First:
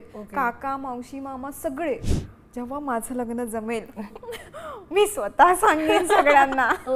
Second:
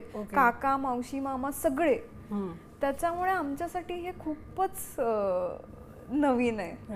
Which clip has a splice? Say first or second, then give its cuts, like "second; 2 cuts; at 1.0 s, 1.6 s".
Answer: first; 1 cut; at 2.2 s